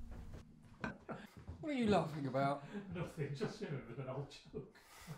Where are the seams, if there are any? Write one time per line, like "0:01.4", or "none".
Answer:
0:01.0